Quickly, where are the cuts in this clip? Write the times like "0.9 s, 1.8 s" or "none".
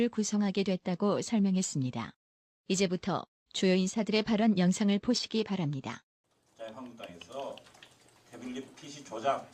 1.5 s